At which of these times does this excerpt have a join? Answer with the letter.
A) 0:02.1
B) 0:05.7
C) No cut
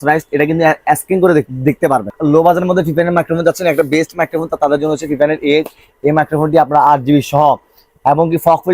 A